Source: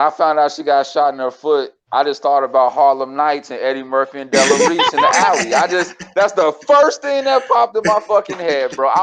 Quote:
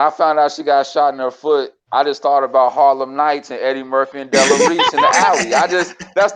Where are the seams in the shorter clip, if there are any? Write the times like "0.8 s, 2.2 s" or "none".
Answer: none

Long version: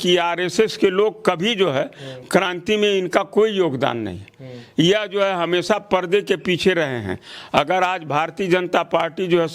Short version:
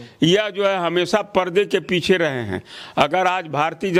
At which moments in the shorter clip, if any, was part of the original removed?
none

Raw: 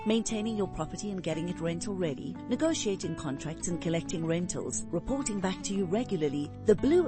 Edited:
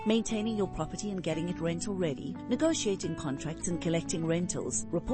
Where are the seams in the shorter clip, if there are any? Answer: none

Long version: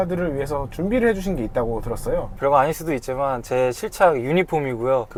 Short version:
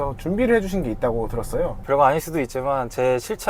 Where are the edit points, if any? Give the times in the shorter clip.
none

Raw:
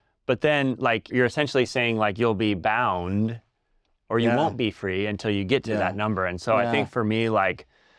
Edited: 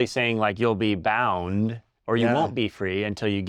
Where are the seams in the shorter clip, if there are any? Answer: 1.9 s

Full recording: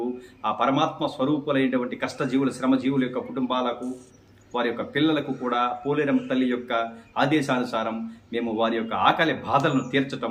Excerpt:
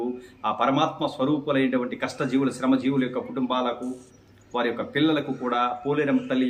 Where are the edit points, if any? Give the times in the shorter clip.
none

